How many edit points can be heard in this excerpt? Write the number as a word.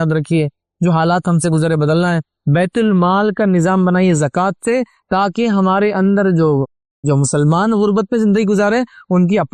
zero